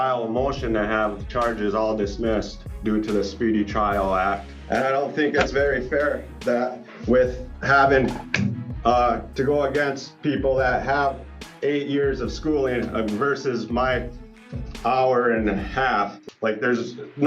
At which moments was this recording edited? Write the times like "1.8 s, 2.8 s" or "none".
2.6 s, 4.5 s, 16.2 s